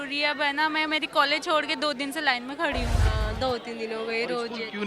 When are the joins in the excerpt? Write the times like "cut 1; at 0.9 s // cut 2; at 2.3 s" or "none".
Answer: cut 1; at 3.0 s